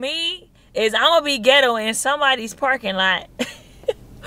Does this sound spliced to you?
no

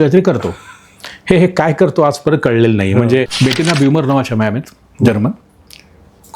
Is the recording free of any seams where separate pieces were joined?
no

